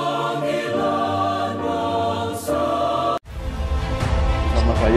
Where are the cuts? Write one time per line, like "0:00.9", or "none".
0:03.2